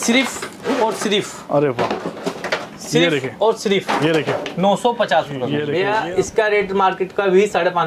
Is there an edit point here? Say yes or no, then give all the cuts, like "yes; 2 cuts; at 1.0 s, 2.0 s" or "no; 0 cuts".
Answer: yes; 1 cut; at 5.7 s